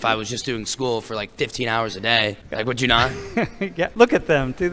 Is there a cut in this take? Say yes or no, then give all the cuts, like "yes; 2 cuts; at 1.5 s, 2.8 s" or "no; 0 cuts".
yes; 2 cuts; at 2.4 s, 3.9 s